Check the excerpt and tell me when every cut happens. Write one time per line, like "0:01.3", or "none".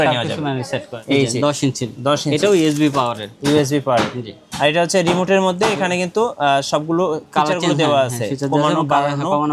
0:00.9